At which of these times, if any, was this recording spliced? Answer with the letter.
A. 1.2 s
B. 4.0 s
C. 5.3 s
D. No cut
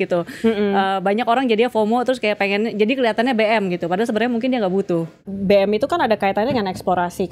C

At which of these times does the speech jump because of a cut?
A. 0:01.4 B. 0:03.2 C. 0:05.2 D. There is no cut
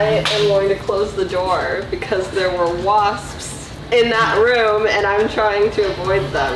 B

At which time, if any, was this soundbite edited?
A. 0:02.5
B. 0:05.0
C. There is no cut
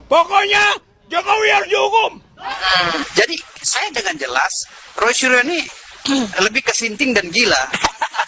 A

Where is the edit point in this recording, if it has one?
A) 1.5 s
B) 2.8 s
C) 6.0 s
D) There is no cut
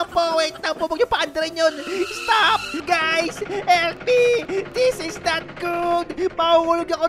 B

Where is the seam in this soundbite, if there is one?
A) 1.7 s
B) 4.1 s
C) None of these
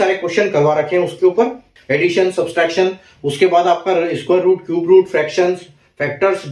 A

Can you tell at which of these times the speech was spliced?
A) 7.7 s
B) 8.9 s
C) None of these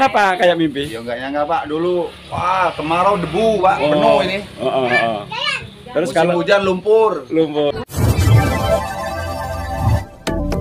A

